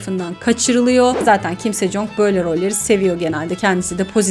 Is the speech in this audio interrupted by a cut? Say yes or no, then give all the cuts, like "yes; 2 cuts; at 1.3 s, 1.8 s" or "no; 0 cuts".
yes; 1 cut; at 1.2 s